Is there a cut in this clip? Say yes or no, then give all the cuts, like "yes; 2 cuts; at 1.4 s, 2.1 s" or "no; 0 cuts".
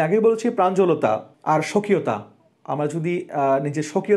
yes; 1 cut; at 1.3 s